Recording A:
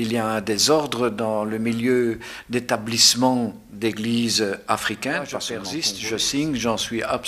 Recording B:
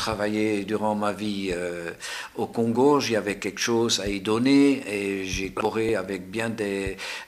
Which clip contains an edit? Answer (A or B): A